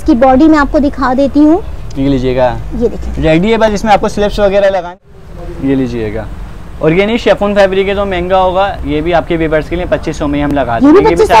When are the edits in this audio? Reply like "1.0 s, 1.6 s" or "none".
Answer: 4.9 s